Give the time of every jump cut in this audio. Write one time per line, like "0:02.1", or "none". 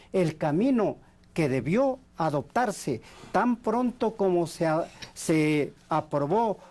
none